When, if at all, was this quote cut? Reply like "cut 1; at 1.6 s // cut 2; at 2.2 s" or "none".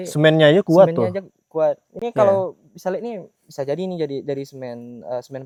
none